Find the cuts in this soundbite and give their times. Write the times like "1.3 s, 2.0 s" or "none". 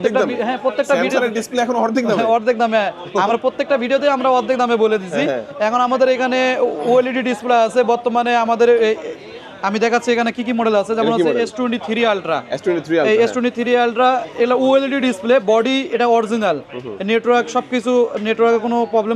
none